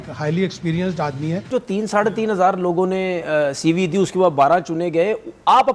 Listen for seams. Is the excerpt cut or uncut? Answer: cut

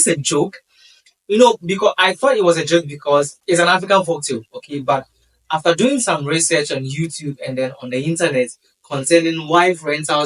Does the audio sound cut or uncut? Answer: cut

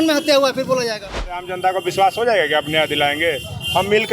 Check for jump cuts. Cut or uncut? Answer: cut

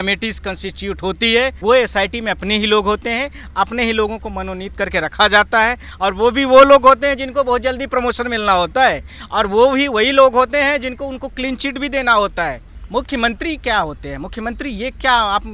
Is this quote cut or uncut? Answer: cut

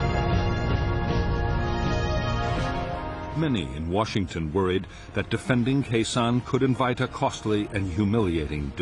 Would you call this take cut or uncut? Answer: cut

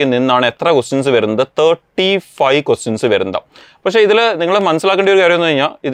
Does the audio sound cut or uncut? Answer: uncut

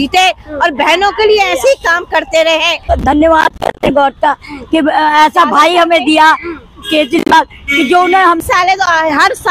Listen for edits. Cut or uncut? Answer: cut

